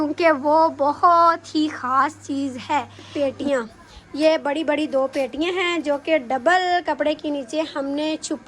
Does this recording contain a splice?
yes; 1 cut; at 3.0 s

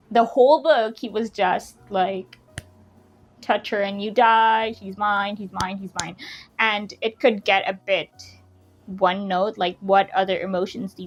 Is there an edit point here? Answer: no; 0 cuts

